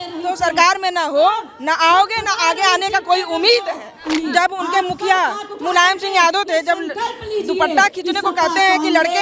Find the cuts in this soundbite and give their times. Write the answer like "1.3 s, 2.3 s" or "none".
4.0 s

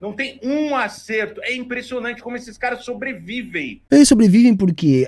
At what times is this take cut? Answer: 3.7 s

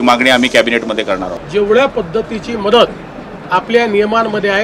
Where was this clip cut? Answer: 1.3 s

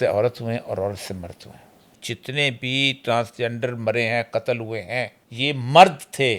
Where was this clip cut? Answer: 2.0 s, 5.2 s

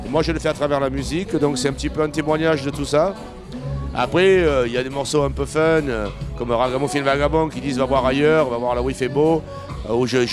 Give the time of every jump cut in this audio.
5.8 s

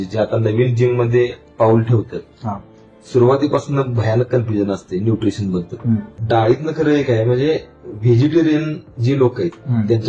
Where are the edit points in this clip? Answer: 6.2 s

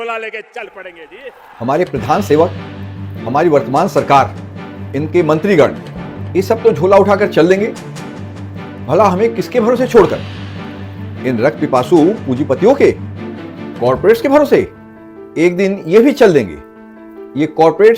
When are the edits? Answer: 1.5 s

